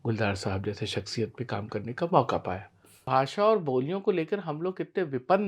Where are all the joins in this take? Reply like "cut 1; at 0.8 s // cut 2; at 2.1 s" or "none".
cut 1; at 3.1 s